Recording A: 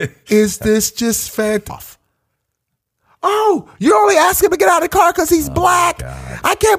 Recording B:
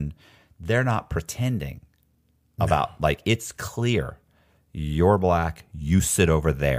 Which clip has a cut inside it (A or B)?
A